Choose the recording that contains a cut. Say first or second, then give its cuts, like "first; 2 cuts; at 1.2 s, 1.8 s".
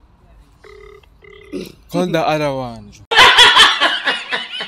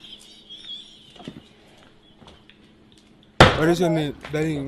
second; 1 cut; at 3.6 s